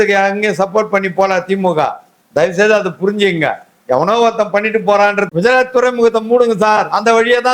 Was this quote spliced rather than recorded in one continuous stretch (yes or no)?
yes